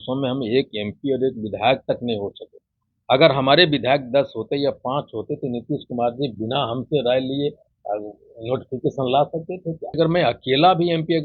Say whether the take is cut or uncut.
cut